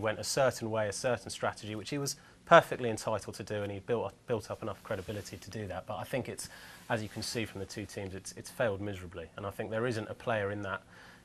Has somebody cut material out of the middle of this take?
no; 0 cuts

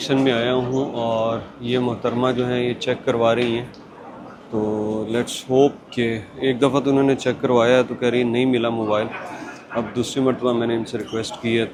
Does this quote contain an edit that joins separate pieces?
no; 0 cuts

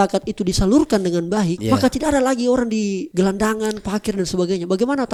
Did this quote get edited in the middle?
no; 0 cuts

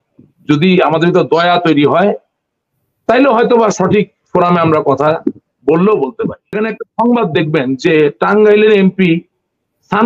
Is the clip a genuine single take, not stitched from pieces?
no; 1 cut; at 6.6 s

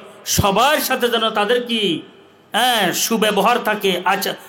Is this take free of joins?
yes; 0 cuts

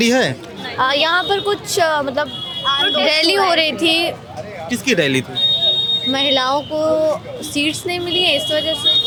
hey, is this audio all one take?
yes; 0 cuts

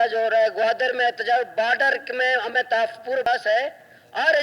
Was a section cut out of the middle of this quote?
yes; 1 cut; at 3.3 s

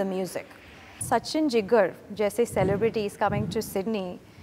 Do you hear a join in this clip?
yes; 1 cut; at 1.0 s

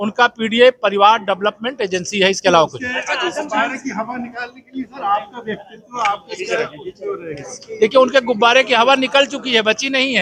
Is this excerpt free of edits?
yes; 0 cuts

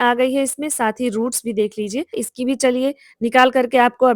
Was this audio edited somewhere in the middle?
yes; 1 cut; at 2.2 s

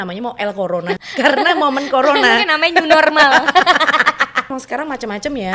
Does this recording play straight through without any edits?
no; 2 cuts; at 1.0 s, 4.5 s

